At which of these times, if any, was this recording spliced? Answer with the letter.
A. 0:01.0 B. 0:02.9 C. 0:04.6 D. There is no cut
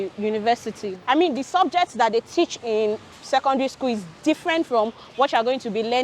A